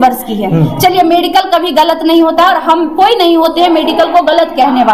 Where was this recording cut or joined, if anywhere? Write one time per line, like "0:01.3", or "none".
none

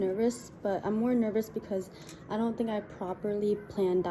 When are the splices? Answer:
none

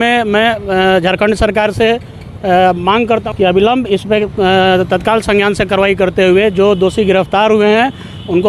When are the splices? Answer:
0:03.3

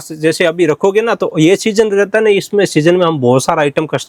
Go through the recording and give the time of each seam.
none

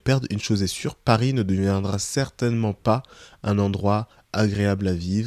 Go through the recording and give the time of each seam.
none

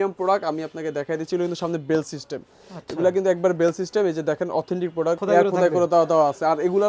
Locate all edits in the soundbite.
none

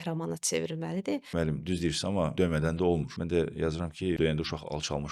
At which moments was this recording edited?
0:01.3
0:02.3
0:03.1
0:04.2

